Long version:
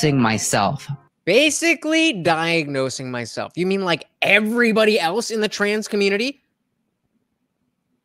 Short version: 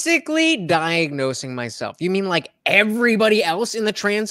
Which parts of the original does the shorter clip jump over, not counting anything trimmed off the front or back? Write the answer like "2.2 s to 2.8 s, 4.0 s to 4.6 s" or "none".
none